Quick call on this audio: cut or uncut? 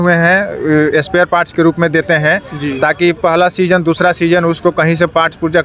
uncut